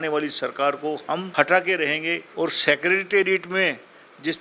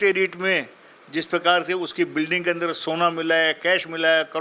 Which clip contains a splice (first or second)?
first